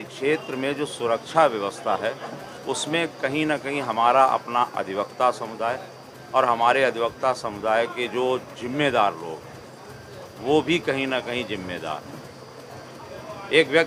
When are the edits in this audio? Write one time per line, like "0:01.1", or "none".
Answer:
none